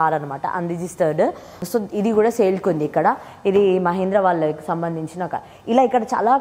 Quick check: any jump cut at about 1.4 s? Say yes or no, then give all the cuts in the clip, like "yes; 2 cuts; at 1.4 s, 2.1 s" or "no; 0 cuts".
no; 0 cuts